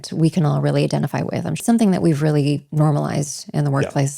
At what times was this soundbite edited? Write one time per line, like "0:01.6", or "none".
0:01.6